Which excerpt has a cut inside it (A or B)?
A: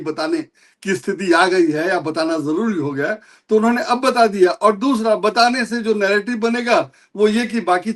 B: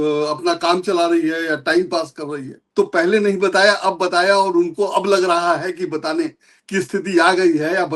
B